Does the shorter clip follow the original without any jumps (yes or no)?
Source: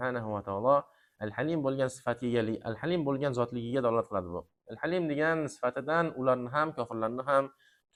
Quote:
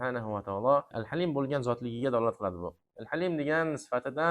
no